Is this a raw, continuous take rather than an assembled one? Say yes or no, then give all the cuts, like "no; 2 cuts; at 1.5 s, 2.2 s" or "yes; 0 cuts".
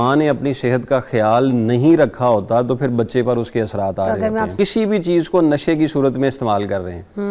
no; 1 cut; at 4.5 s